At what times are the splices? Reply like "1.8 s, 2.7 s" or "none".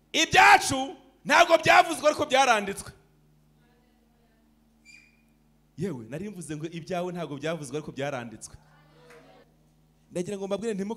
9.5 s

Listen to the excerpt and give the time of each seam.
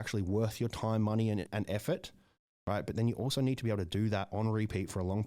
1.5 s

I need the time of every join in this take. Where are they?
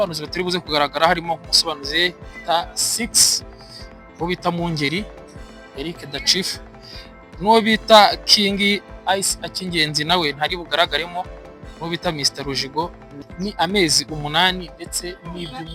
13.2 s

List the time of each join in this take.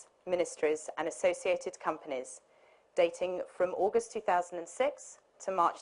3.5 s

